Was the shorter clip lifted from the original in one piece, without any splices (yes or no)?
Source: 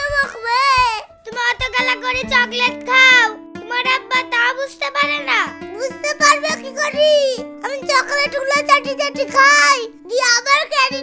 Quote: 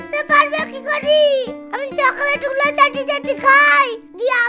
yes